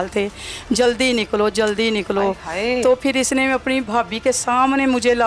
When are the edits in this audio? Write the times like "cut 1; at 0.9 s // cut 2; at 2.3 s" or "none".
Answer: cut 1; at 3.8 s